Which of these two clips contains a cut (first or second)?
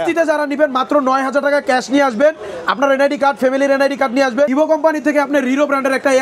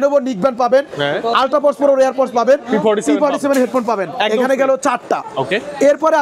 first